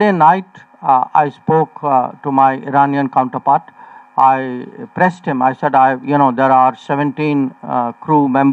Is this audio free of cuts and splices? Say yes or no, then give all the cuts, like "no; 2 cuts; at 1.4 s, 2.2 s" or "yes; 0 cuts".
yes; 0 cuts